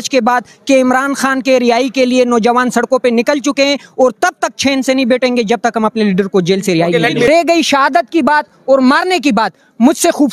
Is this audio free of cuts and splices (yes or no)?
no